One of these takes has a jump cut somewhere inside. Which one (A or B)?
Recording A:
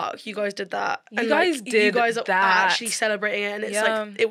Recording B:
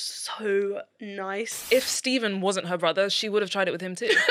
B